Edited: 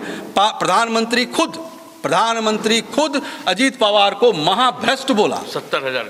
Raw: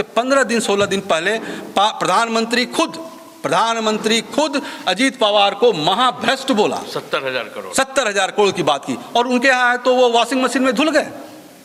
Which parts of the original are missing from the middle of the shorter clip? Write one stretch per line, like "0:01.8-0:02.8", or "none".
none